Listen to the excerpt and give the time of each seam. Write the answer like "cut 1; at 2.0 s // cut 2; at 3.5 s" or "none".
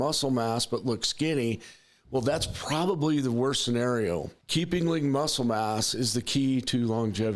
cut 1; at 4.4 s